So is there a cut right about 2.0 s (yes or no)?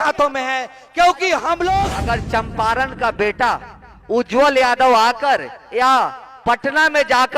yes